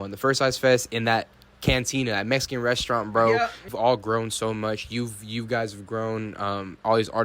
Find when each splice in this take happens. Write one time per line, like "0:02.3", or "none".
0:03.7